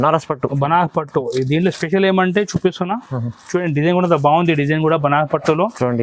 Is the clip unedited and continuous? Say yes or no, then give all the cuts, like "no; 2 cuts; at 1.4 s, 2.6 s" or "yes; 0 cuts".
yes; 0 cuts